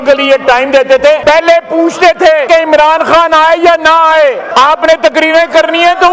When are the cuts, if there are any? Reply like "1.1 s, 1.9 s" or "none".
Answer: 1.2 s, 2.4 s, 4.4 s